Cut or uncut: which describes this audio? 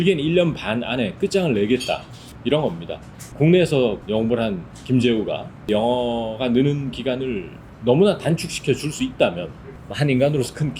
cut